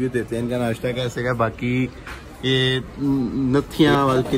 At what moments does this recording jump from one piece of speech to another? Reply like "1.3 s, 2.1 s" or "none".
none